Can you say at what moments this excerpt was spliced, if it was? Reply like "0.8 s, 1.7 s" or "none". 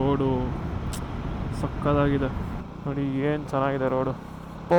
2.6 s